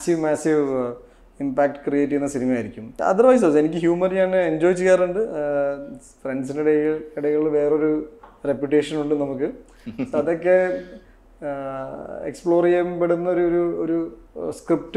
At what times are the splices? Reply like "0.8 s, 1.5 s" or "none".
3.0 s